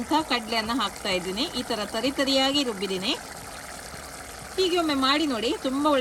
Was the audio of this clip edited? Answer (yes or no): no